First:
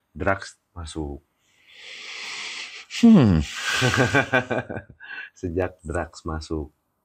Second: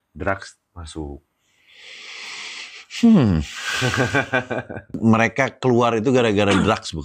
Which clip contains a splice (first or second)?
second